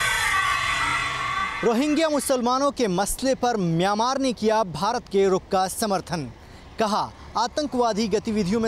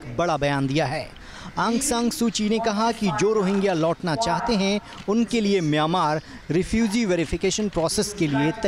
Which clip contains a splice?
first; 1 cut; at 1.2 s

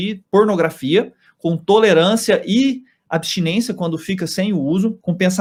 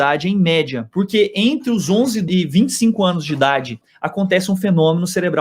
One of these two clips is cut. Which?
second; 3 cuts; at 0.8 s, 2.3 s, 3.8 s

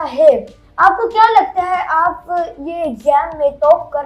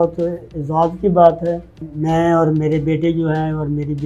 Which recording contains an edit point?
second; 1 cut; at 1.8 s

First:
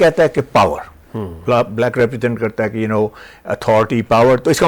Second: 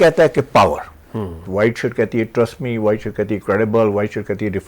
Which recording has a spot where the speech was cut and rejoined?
second; 1 cut; at 1.3 s

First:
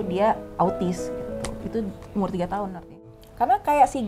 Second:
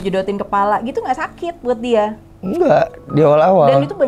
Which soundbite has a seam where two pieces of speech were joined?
first; 1 cut; at 2.9 s

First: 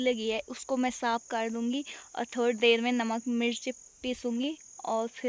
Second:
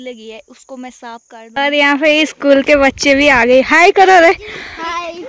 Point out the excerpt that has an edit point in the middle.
second; 1 cut; at 1.3 s

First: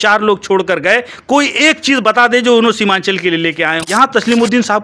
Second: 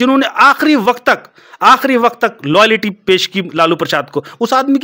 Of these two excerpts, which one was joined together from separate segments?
first; 1 cut; at 3.8 s

